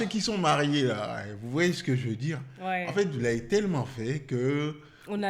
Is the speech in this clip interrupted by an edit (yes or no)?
no